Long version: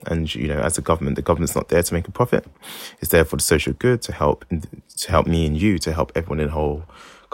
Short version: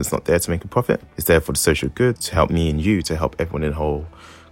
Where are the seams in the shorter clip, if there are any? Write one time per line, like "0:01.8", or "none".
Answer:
0:01.1
0:02.2

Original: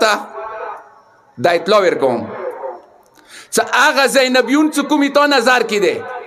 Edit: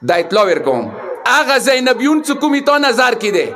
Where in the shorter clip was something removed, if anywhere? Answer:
0:01.2

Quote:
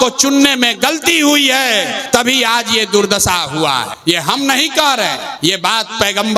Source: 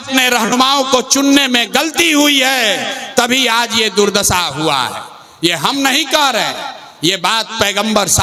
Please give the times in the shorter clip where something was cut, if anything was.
0:02.0
0:03.9
0:05.3

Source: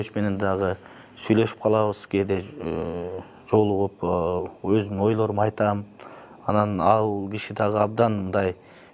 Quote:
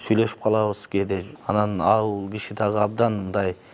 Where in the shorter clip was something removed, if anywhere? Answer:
0:01.3

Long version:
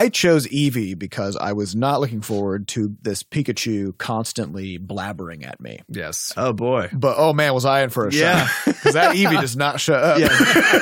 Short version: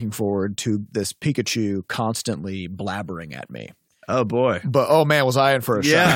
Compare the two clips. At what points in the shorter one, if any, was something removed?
0:03.8

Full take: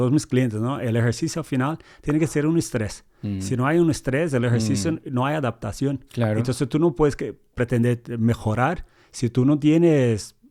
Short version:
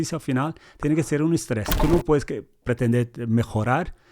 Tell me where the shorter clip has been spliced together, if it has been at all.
0:01.8

